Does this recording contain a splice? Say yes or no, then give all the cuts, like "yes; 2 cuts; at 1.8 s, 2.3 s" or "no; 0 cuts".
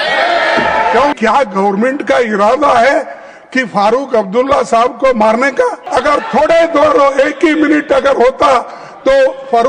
yes; 2 cuts; at 1.2 s, 5.8 s